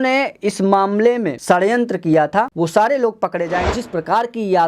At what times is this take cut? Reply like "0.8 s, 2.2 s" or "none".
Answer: 1.3 s, 2.5 s, 3.7 s

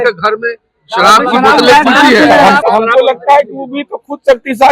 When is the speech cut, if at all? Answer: 2.6 s

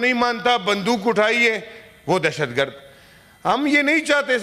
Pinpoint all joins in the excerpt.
none

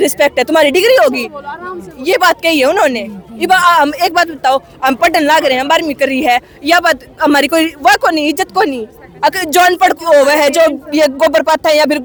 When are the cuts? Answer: none

